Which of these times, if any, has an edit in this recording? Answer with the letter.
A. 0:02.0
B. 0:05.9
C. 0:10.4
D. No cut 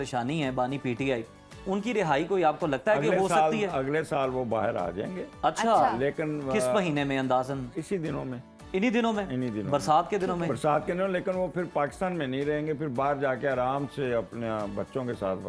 D